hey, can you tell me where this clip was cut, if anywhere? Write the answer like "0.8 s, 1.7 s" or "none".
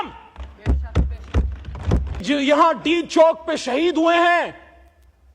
2.2 s